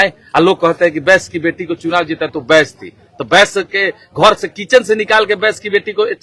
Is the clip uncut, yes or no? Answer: yes